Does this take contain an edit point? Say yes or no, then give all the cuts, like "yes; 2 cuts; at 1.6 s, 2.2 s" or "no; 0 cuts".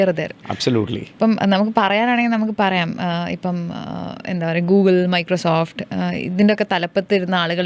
no; 0 cuts